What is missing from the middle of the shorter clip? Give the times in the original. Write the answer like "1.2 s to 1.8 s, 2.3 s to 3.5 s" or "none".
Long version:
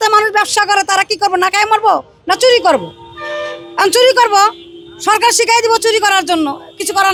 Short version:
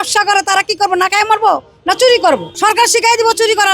2.9 s to 4.9 s